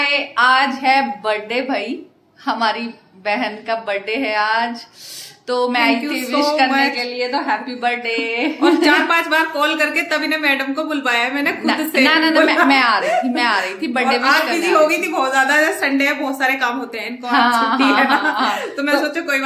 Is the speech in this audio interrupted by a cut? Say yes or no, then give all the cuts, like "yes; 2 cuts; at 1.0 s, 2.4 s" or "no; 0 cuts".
no; 0 cuts